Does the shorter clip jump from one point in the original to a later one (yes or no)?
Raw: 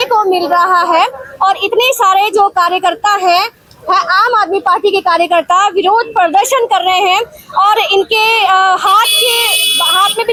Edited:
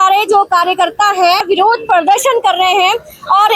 yes